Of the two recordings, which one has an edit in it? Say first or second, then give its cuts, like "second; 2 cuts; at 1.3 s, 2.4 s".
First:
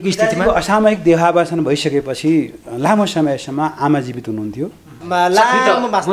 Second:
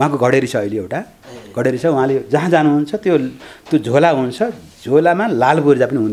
first; 1 cut; at 5.0 s